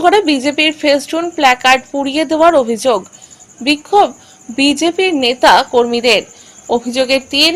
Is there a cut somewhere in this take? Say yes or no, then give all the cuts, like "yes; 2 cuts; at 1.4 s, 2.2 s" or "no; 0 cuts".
no; 0 cuts